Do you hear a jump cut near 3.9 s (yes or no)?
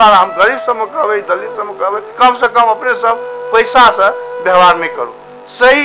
no